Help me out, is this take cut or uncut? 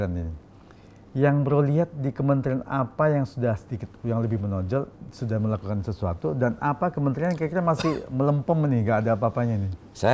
uncut